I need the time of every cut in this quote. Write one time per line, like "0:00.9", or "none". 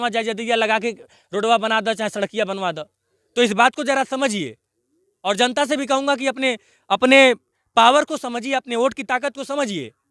none